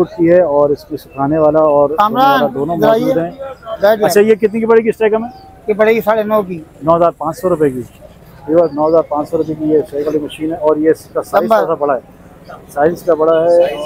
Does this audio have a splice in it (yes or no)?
no